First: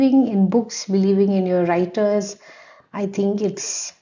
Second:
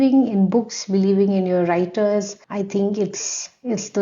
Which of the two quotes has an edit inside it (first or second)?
second